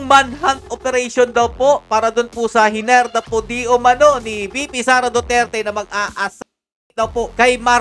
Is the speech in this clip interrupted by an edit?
no; 0 cuts

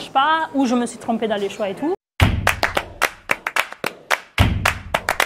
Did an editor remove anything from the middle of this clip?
yes; 1 cut; at 2.1 s

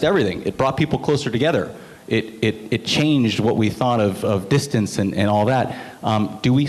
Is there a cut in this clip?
no; 0 cuts

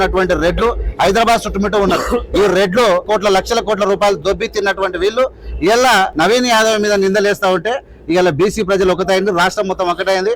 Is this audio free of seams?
no; 3 cuts; at 3.0 s, 4.2 s, 6.1 s

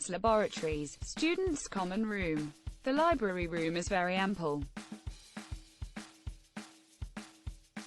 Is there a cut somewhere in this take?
yes; 1 cut; at 4.7 s

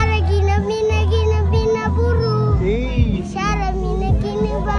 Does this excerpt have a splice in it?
no; 0 cuts

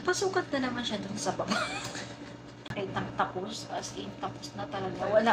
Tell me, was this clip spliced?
yes; 1 cut; at 2.7 s

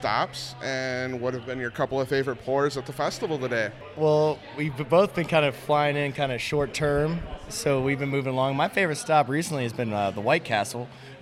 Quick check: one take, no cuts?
yes; 0 cuts

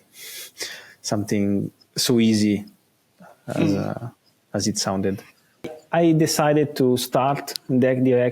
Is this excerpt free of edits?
no; 1 cut; at 5.6 s

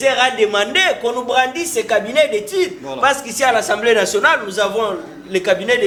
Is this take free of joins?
yes; 0 cuts

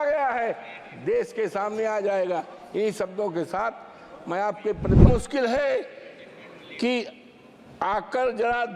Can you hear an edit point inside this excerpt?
yes; 1 cut; at 5.1 s

